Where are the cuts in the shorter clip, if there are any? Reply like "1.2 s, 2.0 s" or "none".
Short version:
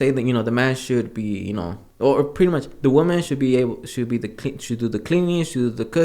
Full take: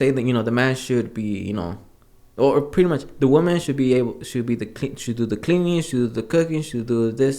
1.8 s